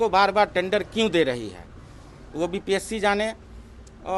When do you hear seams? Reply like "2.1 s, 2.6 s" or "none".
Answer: none